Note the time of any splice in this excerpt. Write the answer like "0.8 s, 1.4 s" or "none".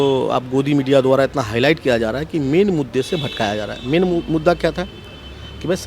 none